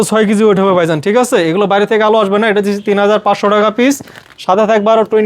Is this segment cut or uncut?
uncut